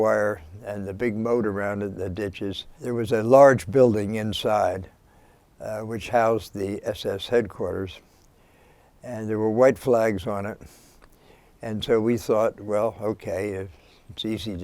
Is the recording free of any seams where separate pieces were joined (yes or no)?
no